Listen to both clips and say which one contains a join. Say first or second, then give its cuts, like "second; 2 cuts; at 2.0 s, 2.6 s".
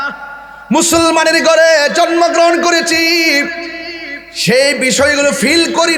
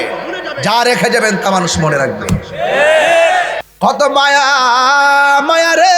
second; 1 cut; at 3.6 s